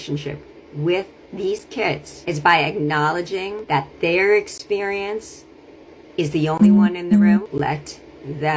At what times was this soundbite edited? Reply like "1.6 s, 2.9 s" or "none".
2.1 s, 3.6 s, 7.5 s